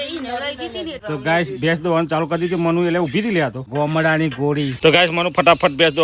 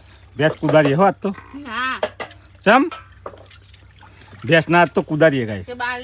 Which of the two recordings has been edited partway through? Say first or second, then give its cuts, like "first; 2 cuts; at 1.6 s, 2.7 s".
first; 3 cuts; at 1.0 s, 3.6 s, 4.7 s